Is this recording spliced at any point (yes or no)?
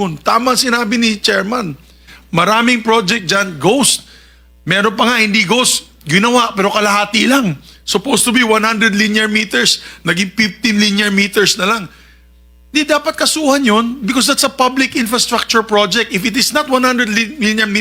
no